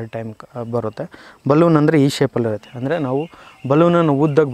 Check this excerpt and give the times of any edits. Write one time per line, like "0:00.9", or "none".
none